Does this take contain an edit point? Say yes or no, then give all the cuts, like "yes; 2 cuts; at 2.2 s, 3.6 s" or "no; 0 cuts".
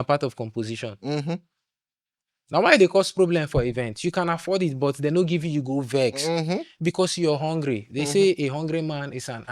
no; 0 cuts